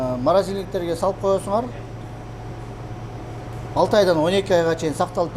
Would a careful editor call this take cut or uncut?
uncut